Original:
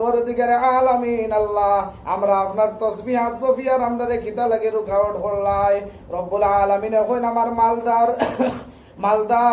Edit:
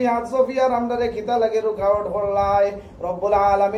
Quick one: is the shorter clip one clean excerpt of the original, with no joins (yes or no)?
yes